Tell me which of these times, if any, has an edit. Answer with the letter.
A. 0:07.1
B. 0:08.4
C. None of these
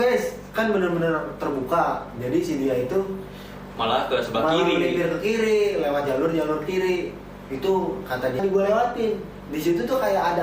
B